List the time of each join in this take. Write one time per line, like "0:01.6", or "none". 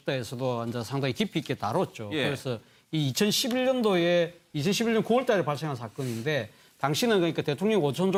none